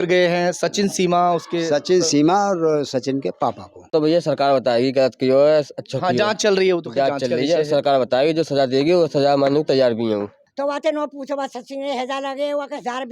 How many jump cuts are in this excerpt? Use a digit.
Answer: 2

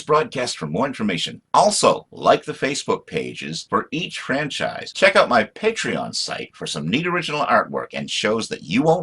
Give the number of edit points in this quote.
1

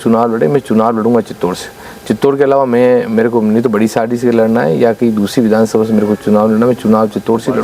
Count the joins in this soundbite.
0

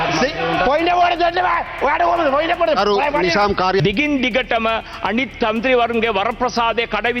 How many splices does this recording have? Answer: 1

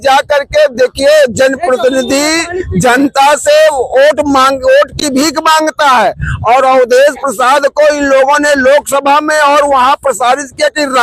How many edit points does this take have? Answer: 0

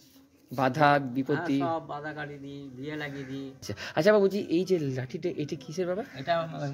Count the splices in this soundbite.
1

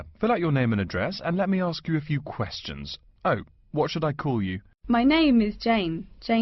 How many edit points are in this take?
1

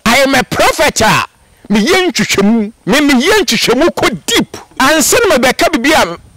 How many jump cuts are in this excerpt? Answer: 2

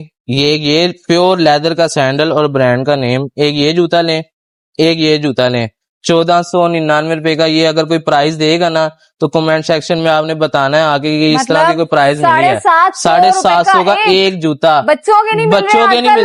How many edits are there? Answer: 0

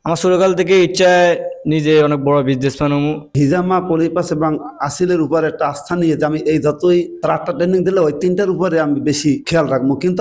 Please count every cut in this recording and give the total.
1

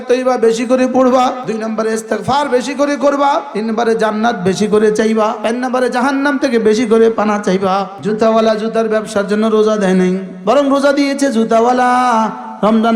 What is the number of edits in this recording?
5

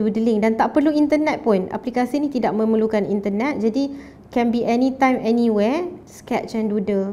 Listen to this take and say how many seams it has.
1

